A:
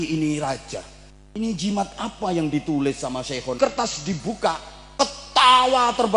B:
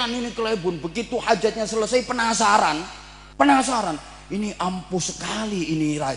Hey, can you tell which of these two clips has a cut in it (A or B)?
A